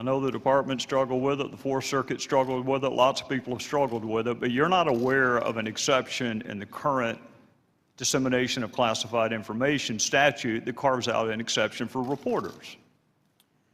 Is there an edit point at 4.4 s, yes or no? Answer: yes